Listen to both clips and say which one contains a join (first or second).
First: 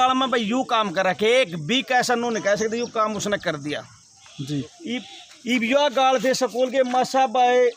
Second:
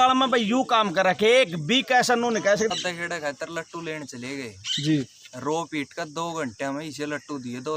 second